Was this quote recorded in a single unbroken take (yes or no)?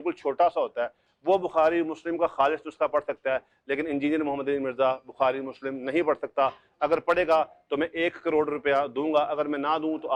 yes